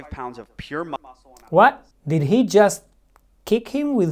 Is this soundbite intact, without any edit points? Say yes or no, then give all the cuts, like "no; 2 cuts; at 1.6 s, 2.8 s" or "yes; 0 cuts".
no; 1 cut; at 1.0 s